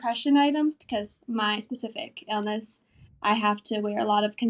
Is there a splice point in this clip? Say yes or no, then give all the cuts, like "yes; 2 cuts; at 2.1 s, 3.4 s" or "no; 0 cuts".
no; 0 cuts